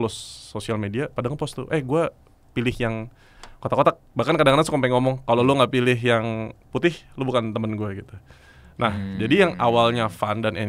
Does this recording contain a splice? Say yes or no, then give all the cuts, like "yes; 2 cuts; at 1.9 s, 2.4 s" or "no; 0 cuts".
no; 0 cuts